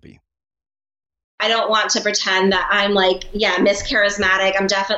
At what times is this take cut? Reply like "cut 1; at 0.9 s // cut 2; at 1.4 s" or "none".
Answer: cut 1; at 1.4 s